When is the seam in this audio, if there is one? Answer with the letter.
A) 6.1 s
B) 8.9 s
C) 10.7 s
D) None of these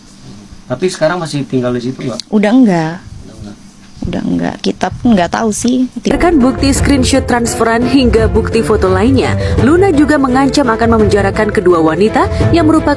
A